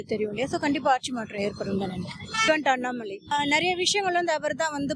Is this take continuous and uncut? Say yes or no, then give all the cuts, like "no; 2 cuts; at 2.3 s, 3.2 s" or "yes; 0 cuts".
no; 2 cuts; at 2.3 s, 3.3 s